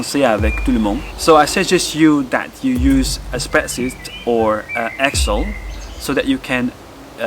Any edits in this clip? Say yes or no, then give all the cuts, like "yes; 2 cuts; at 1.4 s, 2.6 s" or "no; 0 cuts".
yes; 1 cut; at 1.1 s